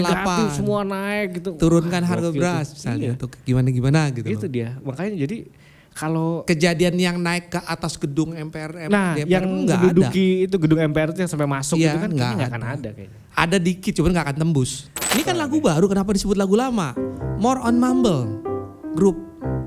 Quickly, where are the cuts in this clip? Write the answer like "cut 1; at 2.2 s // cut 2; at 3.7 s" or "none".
cut 1; at 14.9 s